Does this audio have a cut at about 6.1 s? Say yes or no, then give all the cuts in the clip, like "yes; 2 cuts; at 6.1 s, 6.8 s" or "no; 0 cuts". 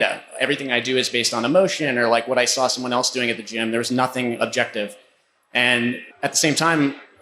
yes; 1 cut; at 6.1 s